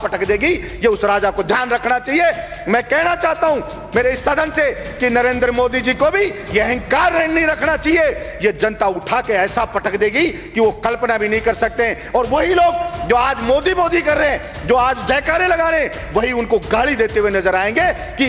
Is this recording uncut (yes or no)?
yes